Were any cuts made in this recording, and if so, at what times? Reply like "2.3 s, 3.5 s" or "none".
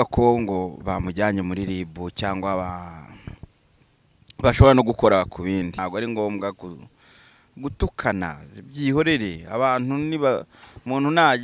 5.7 s